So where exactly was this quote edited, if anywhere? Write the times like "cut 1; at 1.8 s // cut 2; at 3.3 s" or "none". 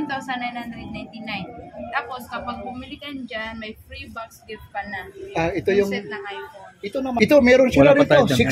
cut 1; at 7.1 s